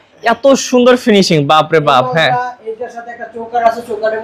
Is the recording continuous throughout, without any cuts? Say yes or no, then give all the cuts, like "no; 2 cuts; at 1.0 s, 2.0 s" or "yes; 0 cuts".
yes; 0 cuts